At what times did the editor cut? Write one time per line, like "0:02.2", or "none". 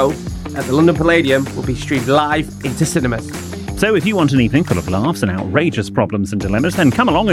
none